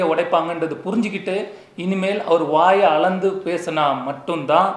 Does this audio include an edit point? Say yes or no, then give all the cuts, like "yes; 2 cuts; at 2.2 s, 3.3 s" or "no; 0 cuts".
no; 0 cuts